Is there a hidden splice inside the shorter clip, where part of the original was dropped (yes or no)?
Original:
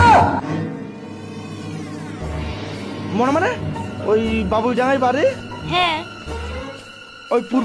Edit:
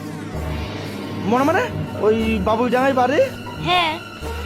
yes